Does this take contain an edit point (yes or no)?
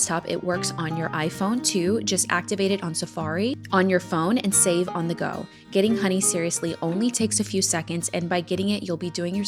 no